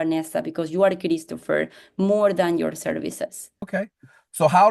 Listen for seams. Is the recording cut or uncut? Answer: cut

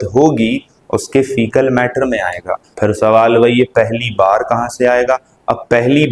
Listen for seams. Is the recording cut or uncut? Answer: cut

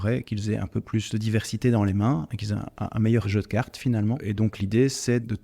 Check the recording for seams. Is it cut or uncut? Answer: cut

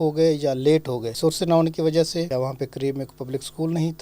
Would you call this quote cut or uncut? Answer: cut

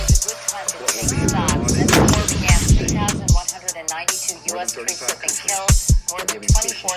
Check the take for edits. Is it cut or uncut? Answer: uncut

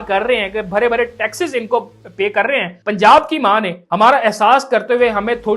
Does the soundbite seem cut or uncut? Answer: cut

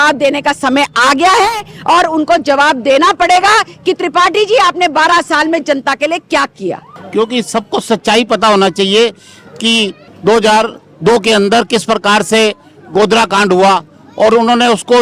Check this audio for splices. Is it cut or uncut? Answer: cut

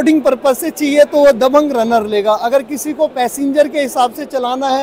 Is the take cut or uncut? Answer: uncut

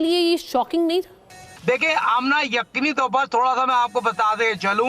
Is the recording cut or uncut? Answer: uncut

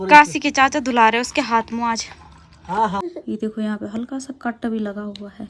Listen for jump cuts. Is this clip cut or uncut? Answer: cut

